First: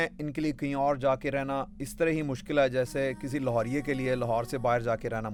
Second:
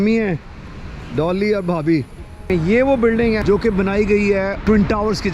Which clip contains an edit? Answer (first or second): second